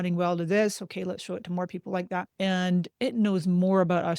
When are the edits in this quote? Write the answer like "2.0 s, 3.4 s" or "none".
2.3 s